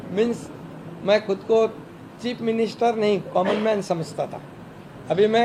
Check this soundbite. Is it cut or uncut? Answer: uncut